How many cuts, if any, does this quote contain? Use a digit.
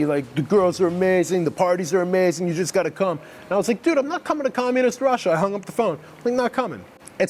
0